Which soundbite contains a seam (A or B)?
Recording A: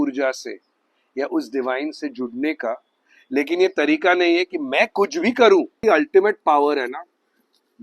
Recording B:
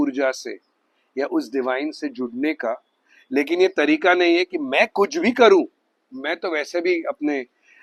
A